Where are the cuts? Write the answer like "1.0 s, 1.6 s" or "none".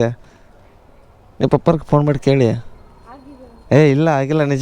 none